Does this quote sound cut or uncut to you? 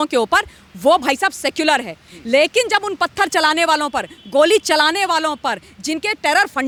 uncut